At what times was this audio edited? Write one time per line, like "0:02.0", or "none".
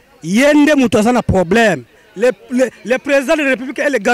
none